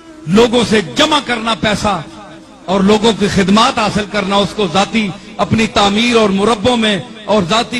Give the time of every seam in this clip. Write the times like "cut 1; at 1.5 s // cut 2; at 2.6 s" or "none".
none